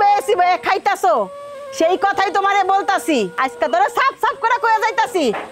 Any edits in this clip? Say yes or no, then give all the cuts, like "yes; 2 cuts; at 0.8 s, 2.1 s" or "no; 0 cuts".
yes; 1 cut; at 3.3 s